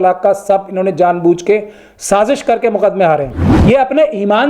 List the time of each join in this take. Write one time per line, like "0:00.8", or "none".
0:03.5